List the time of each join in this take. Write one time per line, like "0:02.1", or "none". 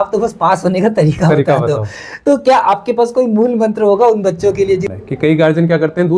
0:04.9